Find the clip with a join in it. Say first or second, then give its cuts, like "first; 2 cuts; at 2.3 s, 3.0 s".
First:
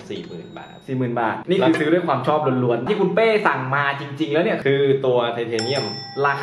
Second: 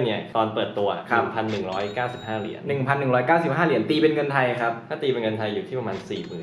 first; 3 cuts; at 1.4 s, 2.8 s, 4.6 s